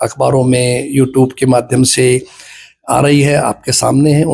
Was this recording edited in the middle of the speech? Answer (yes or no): no